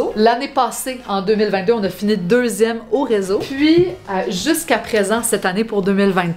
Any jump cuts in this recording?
yes; 1 cut; at 3.5 s

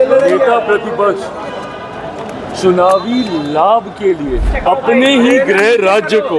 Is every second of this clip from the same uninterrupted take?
no; 1 cut; at 4.5 s

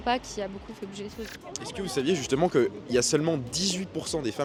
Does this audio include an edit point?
no; 0 cuts

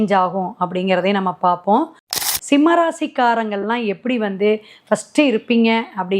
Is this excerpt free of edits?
no; 1 cut; at 2.1 s

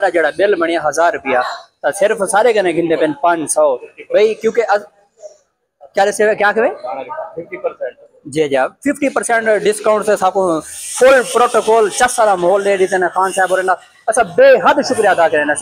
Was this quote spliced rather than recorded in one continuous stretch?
no; 0 cuts

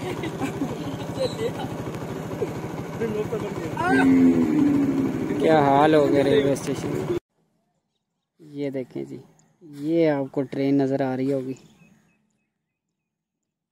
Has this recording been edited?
no; 0 cuts

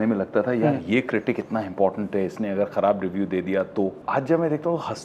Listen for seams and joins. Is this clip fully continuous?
no; 1 cut; at 4.0 s

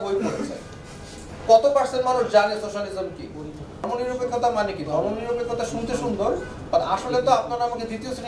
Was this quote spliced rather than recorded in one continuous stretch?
yes; 1 cut; at 3.9 s

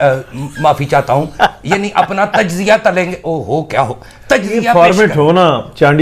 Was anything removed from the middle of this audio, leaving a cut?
yes; 1 cut; at 4.7 s

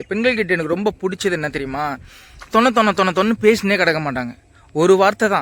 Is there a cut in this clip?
no; 0 cuts

